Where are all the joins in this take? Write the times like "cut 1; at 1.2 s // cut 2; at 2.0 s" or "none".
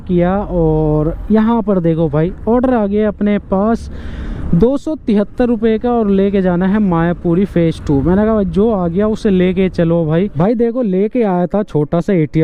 cut 1; at 10.3 s

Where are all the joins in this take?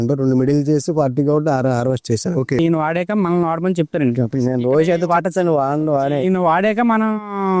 cut 1; at 2.6 s

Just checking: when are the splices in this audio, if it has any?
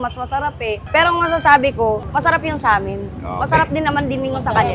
none

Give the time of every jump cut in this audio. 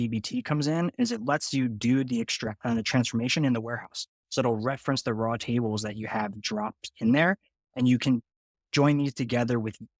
none

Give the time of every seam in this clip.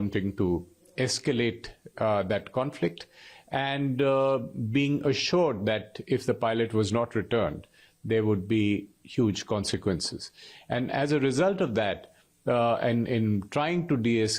none

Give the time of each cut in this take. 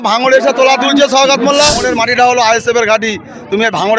cut 1; at 1.8 s

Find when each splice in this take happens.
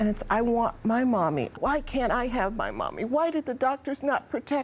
cut 1; at 1.6 s

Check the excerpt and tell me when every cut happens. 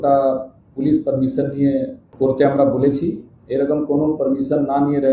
cut 1; at 2.0 s

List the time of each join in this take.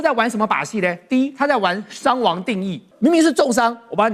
cut 1; at 2.9 s

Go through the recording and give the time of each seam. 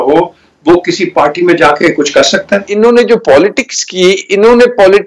cut 1; at 2.7 s

